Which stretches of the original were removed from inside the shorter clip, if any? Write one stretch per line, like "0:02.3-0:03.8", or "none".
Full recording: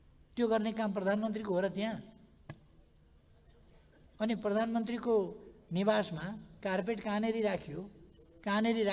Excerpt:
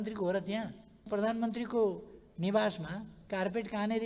0:02.4-0:04.4